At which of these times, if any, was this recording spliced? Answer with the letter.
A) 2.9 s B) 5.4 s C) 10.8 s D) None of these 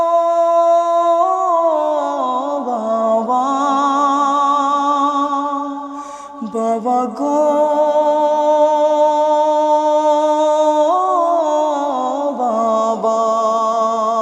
D